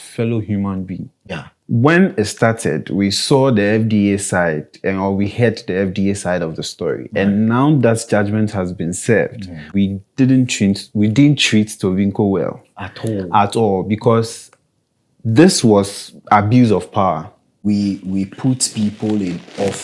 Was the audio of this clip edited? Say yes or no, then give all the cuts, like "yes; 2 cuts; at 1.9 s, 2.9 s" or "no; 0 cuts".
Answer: yes; 3 cuts; at 1.5 s, 9.6 s, 17.5 s